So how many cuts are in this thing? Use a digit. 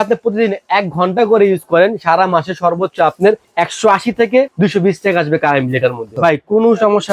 3